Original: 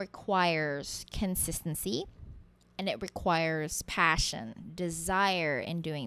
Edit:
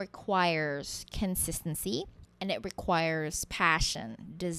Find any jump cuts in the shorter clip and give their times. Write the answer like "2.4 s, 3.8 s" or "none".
2.2 s